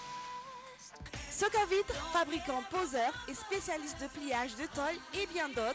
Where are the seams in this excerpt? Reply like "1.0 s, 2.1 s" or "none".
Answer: 1.1 s